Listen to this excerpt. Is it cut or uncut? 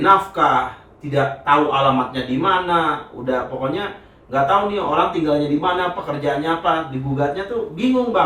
uncut